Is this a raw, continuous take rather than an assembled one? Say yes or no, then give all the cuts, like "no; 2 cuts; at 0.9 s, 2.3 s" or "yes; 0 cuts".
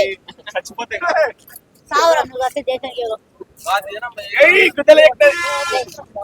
no; 1 cut; at 2.8 s